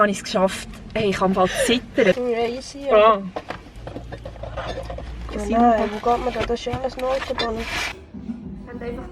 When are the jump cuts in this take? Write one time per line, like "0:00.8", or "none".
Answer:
0:02.1
0:07.9